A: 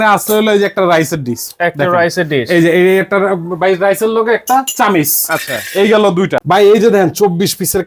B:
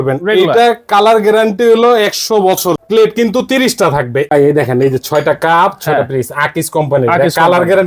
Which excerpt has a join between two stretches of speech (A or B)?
B